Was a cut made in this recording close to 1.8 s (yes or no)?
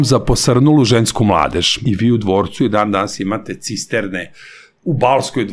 yes